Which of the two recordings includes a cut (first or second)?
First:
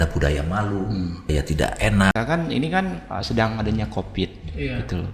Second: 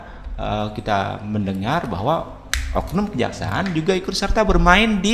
first